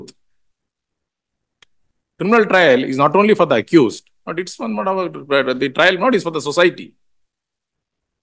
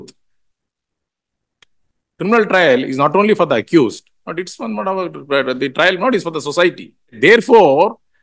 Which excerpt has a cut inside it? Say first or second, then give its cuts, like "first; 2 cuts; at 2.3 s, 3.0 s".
second; 1 cut; at 7.2 s